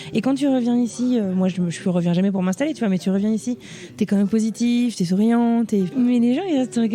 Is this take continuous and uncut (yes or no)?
no